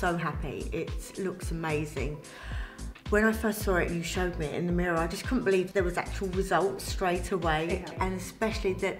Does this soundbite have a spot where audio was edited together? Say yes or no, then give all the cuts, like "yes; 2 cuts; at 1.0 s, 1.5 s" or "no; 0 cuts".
yes; 2 cuts; at 5.7 s, 7.9 s